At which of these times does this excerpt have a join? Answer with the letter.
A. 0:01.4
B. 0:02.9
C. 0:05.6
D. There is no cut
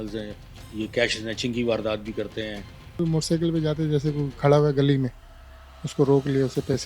B